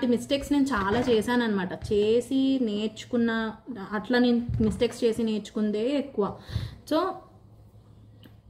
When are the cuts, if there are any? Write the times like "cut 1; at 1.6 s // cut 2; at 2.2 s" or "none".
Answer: none